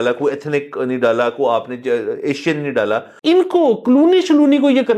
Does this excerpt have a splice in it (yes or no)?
yes